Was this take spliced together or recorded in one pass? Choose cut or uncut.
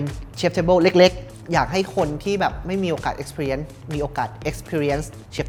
uncut